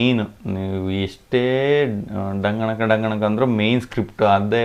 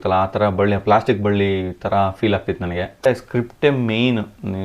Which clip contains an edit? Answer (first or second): second